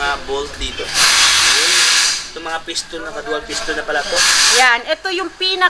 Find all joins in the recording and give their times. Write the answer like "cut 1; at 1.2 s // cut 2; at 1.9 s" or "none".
cut 1; at 4.5 s